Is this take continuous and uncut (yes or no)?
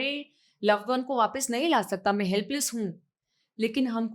yes